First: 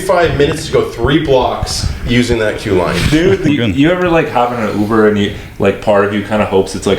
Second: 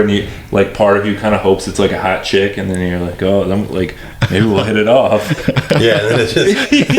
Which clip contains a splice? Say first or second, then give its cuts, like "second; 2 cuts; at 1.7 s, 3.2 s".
first; 1 cut; at 3.5 s